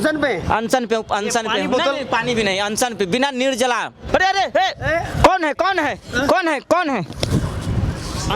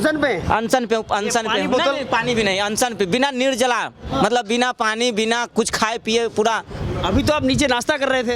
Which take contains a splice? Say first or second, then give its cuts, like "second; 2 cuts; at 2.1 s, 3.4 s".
first; 1 cut; at 4.0 s